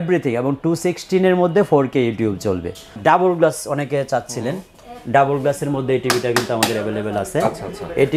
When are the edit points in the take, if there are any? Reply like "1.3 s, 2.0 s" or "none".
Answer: 2.9 s